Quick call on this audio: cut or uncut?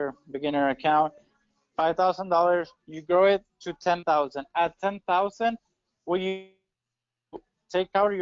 uncut